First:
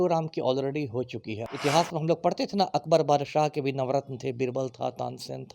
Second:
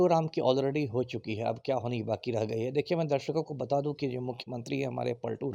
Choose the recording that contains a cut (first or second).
first